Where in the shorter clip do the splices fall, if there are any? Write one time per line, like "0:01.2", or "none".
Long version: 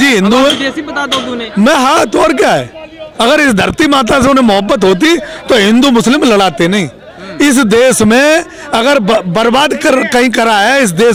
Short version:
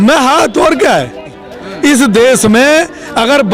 0:01.4

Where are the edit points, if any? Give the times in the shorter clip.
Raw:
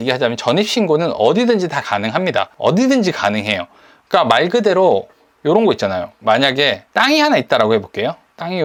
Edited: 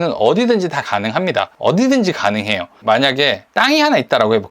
0:02.7

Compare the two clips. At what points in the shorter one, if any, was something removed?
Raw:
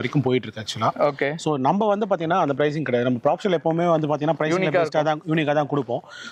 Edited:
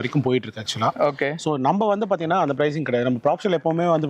none

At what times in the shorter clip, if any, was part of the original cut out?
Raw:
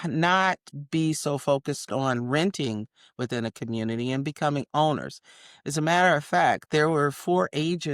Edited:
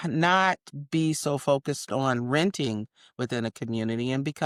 none

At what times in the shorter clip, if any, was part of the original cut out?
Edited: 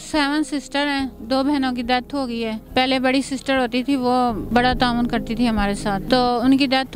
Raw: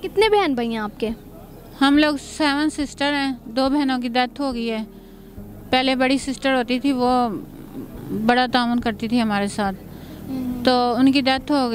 0:02.6
0:04.4
0:06.0

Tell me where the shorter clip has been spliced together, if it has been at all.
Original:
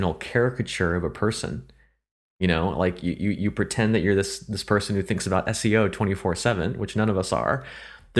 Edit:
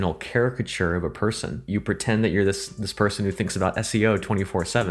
0:01.7

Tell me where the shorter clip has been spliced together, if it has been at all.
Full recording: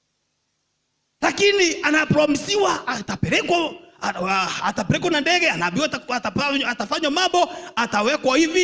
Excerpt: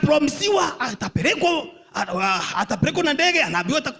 none

